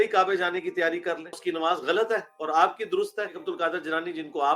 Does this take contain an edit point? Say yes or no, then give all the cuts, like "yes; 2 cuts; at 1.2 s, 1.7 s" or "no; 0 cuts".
yes; 2 cuts; at 1.4 s, 3.4 s